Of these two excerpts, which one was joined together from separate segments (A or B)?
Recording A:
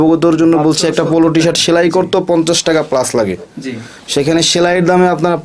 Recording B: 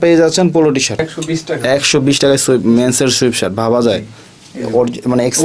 B